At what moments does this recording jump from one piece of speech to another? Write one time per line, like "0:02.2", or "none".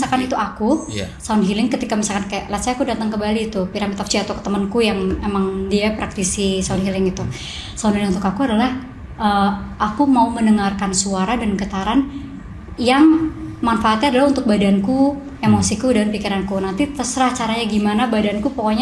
none